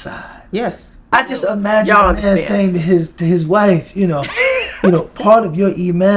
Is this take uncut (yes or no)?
no